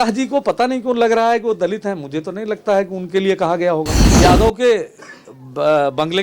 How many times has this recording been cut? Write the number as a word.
one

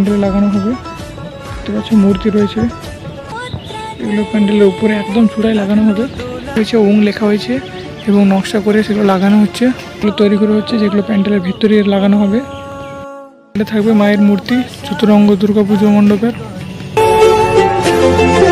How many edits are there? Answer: four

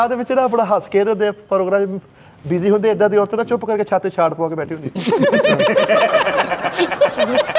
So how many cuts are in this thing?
zero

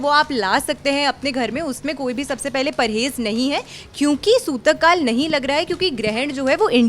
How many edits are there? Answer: zero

